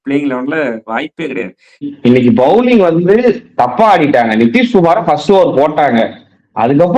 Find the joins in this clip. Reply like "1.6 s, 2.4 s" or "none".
1.9 s

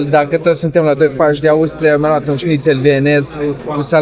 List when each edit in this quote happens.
none

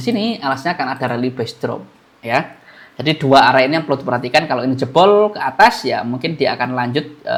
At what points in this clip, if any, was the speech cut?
none

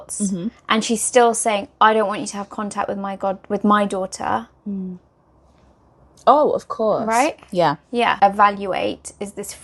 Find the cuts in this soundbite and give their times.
8.2 s

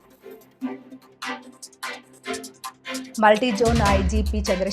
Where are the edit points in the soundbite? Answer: 3.0 s

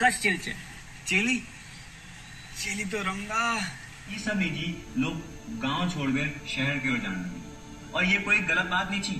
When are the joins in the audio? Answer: 4.2 s

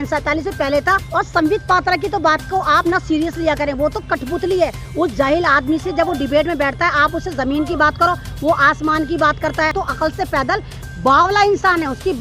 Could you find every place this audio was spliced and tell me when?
1.0 s, 9.7 s

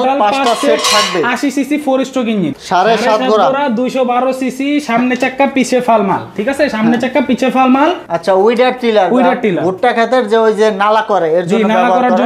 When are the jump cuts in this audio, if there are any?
2.5 s, 8.1 s

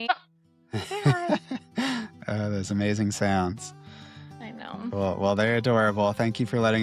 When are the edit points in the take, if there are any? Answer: none

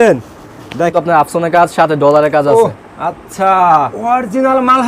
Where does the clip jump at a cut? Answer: 0.9 s, 3.9 s

